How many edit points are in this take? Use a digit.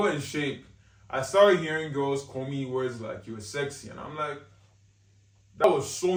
0